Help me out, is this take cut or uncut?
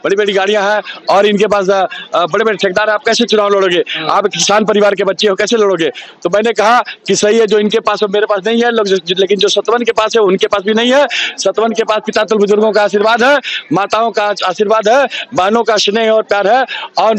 uncut